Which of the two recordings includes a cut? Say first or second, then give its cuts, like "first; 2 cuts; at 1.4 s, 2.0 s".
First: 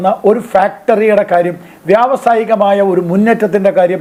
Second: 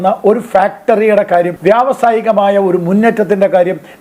second; 1 cut; at 1.5 s